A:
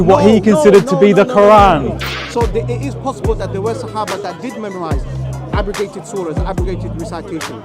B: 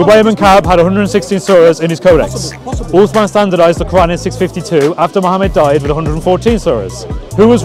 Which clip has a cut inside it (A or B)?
A